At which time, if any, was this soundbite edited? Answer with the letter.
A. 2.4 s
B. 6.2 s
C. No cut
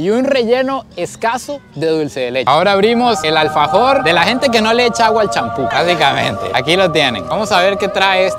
A